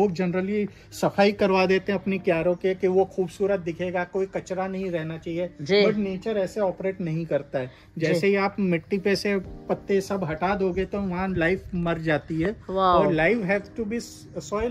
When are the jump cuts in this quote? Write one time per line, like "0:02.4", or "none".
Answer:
none